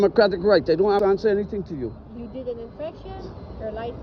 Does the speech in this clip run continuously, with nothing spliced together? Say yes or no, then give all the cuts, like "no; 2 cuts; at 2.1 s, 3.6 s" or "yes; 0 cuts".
no; 1 cut; at 1.0 s